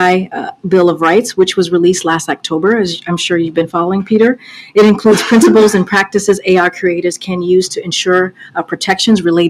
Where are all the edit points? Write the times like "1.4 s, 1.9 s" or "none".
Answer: 3.0 s, 4.5 s